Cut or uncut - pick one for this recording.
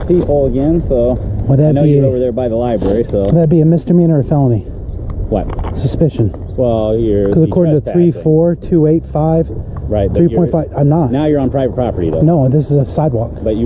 uncut